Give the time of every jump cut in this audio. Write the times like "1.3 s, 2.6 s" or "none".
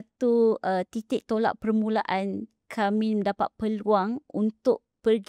none